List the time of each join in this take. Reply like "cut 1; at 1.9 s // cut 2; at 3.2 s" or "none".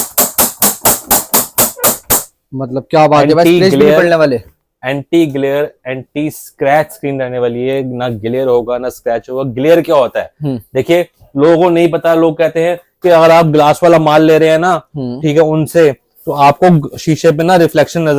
none